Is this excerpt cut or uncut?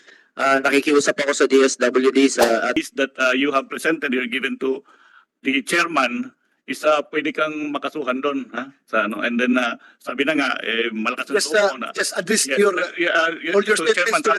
cut